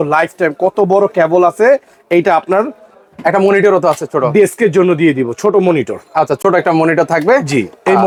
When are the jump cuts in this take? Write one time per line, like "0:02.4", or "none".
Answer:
none